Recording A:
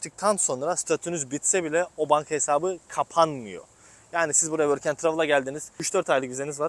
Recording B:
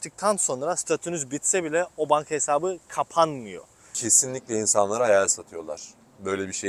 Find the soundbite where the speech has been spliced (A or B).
B